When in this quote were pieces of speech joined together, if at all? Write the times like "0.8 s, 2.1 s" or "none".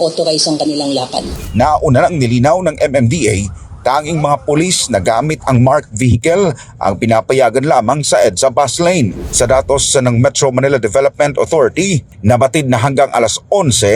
1.3 s, 9.2 s